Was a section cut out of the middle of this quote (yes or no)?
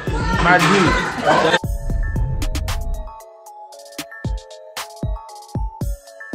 yes